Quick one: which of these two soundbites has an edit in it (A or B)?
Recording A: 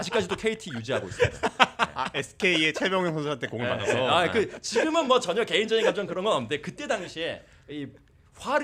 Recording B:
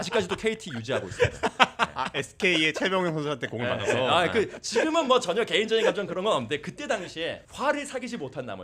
B